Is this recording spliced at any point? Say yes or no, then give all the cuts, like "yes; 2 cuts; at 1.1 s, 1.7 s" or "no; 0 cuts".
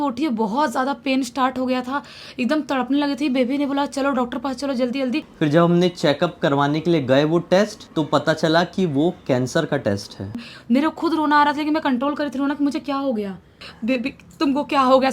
yes; 4 cuts; at 5.3 s, 7.8 s, 10.4 s, 13.6 s